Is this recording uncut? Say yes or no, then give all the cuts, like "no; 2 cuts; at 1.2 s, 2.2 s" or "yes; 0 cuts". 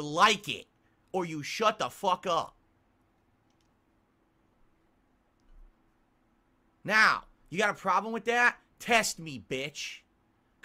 yes; 0 cuts